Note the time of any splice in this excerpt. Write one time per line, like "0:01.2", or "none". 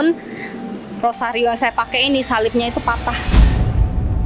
0:03.2